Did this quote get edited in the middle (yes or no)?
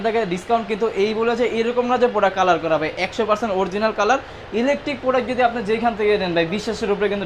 no